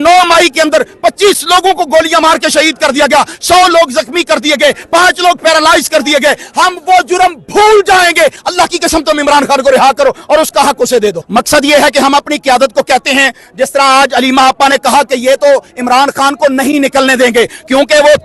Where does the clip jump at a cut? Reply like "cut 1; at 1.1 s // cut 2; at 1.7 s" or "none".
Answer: cut 1; at 11.2 s